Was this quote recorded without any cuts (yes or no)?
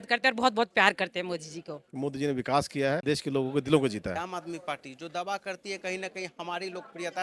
no